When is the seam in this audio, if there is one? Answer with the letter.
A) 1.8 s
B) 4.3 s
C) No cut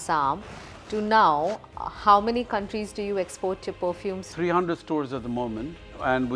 B